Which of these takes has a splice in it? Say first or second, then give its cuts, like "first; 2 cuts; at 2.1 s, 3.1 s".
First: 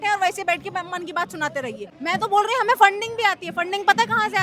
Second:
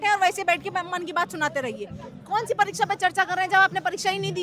first; 1 cut; at 1.9 s